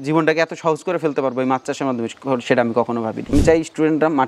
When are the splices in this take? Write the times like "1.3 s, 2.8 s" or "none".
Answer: 3.3 s